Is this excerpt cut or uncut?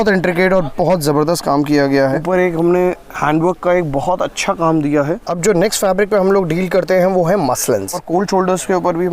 cut